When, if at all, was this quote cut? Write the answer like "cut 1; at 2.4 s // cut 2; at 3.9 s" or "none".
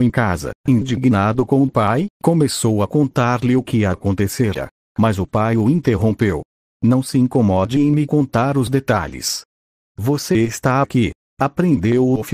none